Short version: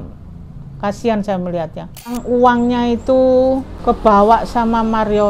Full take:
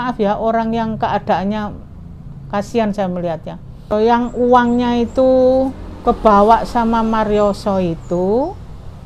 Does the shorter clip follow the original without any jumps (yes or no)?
no